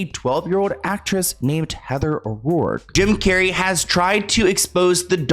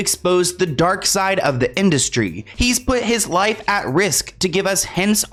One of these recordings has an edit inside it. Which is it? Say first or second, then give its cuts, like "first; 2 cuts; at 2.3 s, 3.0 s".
first; 1 cut; at 2.8 s